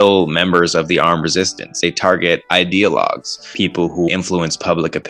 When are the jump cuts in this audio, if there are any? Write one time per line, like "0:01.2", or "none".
0:01.8
0:03.9

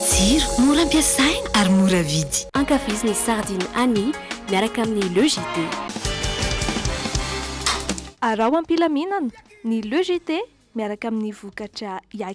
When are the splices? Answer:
none

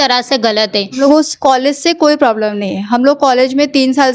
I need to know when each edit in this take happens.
0:01.0

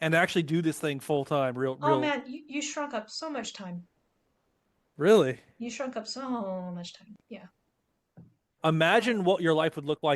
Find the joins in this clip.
0:08.5

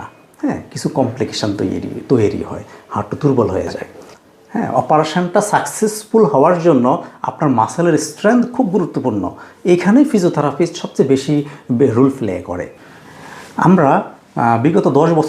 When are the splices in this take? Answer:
0:03.9
0:12.7

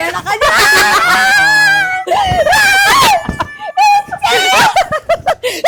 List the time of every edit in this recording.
none

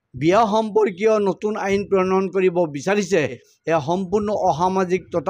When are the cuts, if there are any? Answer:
0:03.5

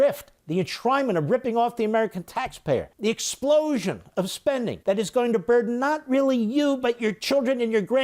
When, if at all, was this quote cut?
0:02.9
0:04.8

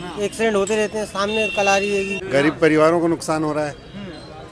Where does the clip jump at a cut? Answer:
0:02.2

